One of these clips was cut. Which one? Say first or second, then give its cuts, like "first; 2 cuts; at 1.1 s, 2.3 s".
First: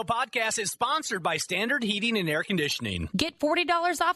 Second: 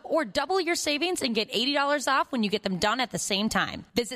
first; 1 cut; at 3.0 s